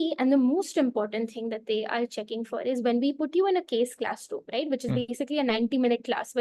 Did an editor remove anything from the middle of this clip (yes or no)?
no